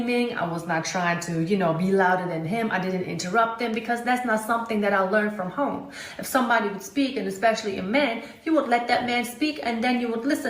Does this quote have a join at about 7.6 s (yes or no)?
yes